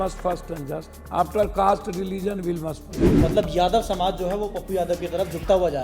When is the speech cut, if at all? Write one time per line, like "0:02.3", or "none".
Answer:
0:00.9
0:03.0